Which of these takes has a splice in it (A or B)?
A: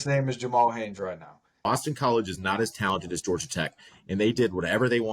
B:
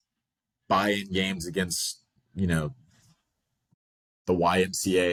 A